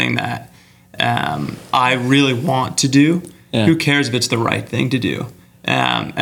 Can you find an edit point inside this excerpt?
no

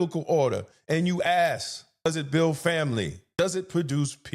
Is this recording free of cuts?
no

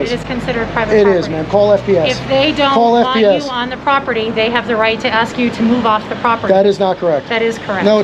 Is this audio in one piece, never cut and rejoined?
yes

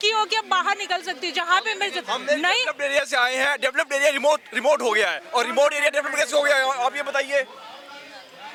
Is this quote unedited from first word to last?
yes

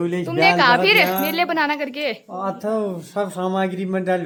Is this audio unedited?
yes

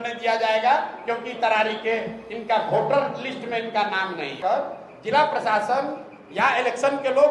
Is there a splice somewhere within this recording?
yes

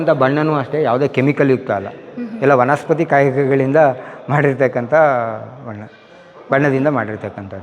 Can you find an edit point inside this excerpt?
no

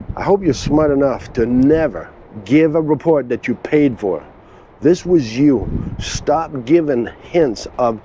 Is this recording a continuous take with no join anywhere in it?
no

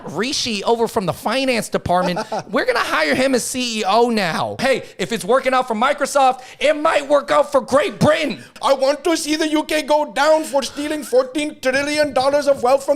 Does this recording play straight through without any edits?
no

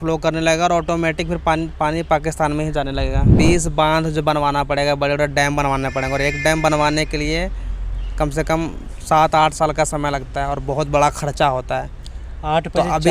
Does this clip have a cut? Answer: yes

